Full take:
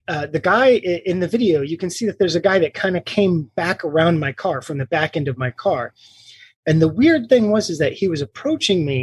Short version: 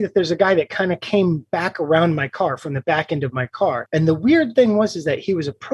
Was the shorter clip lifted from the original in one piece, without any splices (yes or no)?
no